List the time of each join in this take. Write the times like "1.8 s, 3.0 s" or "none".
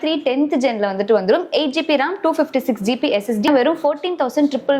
3.5 s